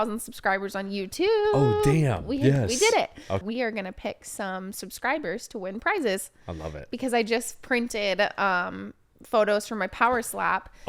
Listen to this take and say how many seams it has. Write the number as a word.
one